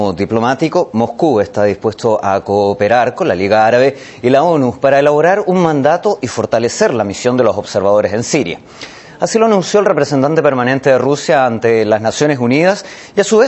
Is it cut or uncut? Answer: cut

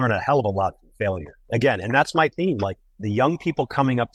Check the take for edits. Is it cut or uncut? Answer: uncut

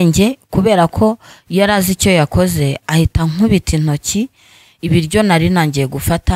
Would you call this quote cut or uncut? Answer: uncut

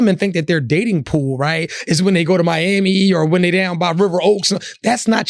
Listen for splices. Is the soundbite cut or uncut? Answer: uncut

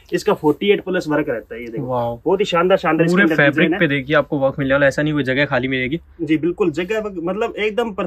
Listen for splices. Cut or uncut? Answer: uncut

